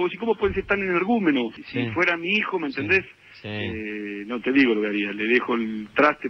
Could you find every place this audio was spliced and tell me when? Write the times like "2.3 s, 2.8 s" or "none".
1.6 s